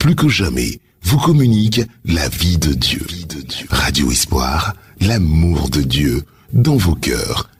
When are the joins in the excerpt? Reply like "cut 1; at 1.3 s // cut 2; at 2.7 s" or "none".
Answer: none